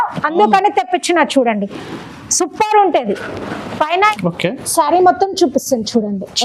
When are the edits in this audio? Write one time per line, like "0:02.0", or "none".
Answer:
0:04.1